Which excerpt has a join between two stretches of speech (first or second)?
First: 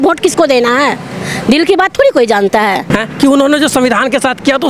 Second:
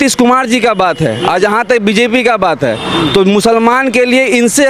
first